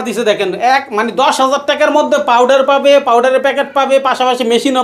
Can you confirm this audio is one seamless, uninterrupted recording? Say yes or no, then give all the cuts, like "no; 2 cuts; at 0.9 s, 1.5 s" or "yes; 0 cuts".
yes; 0 cuts